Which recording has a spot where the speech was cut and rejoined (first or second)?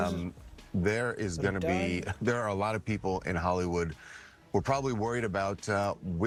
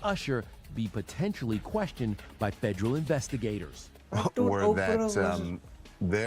second